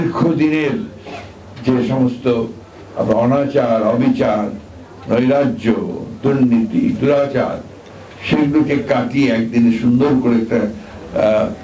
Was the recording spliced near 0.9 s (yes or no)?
no